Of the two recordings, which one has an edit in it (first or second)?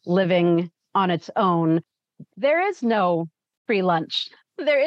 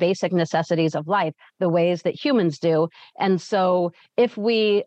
first